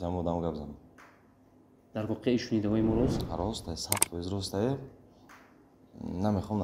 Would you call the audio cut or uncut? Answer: uncut